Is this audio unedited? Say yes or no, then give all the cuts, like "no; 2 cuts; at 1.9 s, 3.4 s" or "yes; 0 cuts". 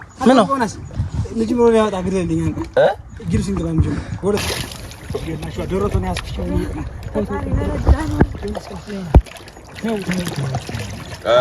no; 1 cut; at 4.4 s